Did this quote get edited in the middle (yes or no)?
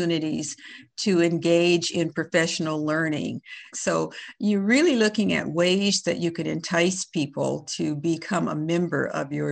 yes